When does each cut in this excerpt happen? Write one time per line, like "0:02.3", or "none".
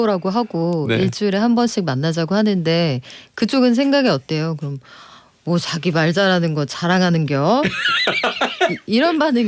none